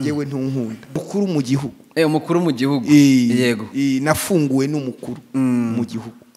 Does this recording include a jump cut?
yes; 1 cut; at 1.0 s

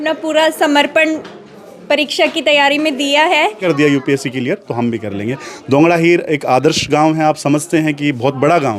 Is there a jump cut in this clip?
yes; 1 cut; at 3.6 s

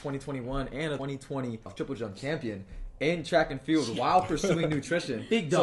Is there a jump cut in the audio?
yes; 2 cuts; at 1.6 s, 3.9 s

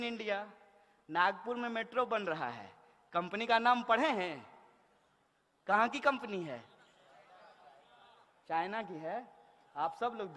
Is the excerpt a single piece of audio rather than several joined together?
yes; 0 cuts

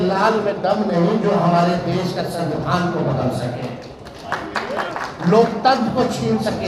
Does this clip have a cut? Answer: no; 0 cuts

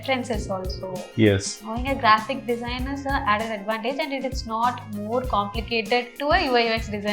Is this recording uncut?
no; 1 cut; at 6.1 s

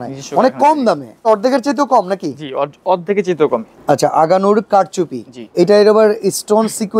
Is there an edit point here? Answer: yes; 3 cuts; at 1.3 s, 3.7 s, 5.5 s

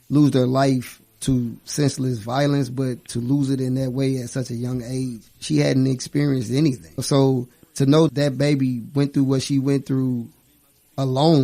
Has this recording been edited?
yes; 1 cut; at 6.9 s

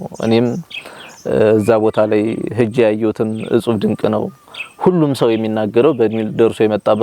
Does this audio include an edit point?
no; 0 cuts

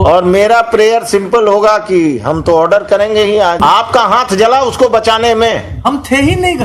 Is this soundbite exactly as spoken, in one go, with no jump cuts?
no; 1 cut; at 3.6 s

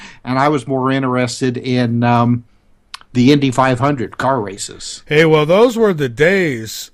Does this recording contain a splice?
yes; 1 cut; at 2.6 s

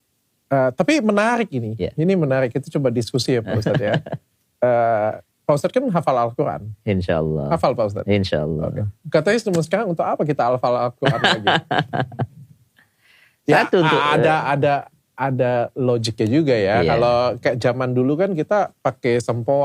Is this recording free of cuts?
yes; 0 cuts

